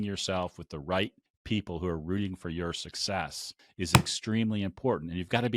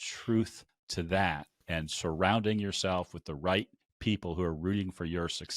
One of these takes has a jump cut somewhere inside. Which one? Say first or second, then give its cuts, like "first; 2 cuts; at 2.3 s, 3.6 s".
second; 1 cut; at 1.7 s